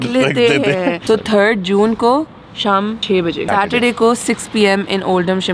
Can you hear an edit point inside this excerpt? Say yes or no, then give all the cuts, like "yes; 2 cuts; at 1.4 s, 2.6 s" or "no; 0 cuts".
yes; 2 cuts; at 1.0 s, 3.3 s